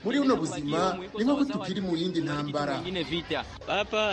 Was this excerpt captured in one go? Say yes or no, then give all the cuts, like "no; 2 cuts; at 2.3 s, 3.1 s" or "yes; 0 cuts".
yes; 0 cuts